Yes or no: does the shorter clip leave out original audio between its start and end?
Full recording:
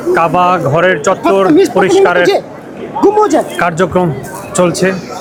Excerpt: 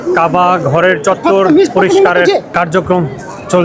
yes